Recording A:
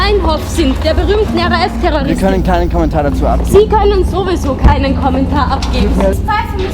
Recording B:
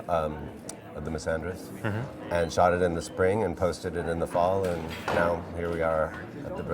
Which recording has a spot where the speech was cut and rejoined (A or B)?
A